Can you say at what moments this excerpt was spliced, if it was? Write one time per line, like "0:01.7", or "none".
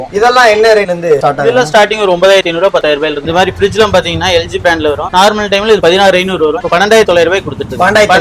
0:03.2